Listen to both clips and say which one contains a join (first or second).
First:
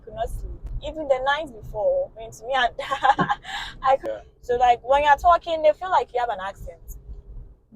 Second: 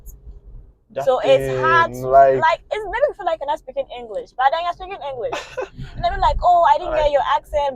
first